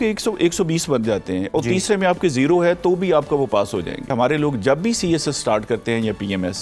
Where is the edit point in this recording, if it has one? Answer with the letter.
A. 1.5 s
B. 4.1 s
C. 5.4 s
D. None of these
B